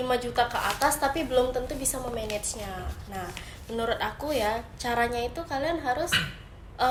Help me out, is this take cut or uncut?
uncut